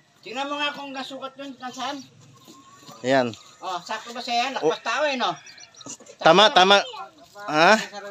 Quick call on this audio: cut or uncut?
uncut